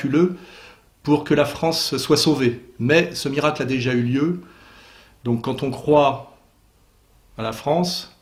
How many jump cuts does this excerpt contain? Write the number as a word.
zero